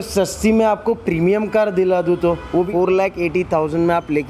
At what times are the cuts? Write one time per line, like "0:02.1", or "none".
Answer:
0:02.7